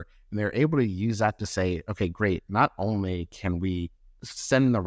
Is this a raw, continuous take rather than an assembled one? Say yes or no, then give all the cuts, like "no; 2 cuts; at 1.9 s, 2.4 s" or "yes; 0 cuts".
yes; 0 cuts